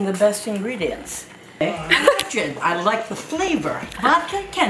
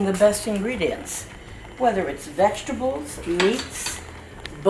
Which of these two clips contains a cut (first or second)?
first